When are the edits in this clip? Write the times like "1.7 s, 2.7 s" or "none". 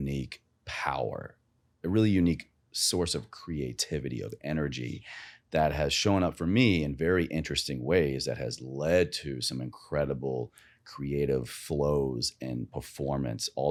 none